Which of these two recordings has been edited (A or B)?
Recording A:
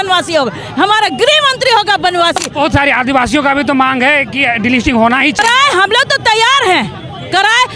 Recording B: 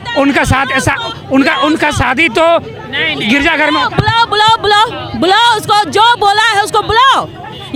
A